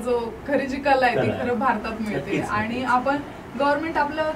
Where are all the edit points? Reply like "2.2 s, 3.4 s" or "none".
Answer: none